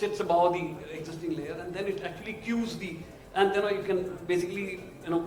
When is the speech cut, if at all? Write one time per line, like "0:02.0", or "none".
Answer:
none